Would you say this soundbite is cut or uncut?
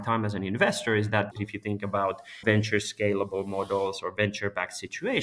cut